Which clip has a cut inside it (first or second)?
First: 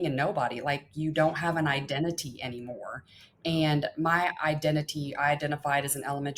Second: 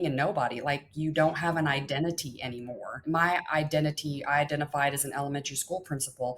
second